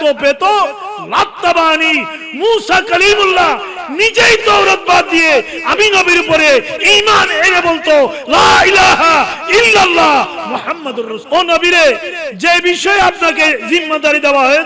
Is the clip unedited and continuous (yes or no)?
no